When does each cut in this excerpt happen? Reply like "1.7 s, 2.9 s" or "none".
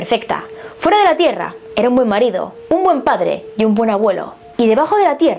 4.4 s